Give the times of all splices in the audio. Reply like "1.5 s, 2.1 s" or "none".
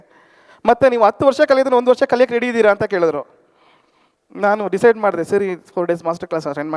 none